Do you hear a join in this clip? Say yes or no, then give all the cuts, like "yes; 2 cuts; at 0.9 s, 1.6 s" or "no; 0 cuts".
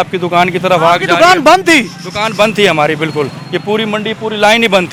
no; 0 cuts